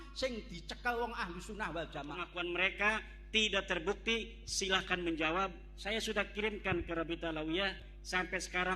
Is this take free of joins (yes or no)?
no